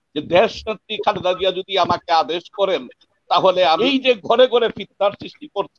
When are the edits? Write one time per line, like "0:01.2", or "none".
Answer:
0:03.8